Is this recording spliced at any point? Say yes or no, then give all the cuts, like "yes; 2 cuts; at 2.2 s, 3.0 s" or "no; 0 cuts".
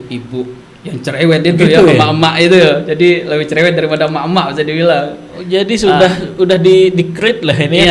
no; 0 cuts